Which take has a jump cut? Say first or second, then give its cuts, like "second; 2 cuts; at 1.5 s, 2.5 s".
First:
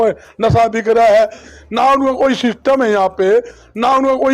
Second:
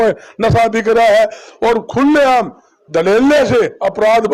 first; 1 cut; at 1.5 s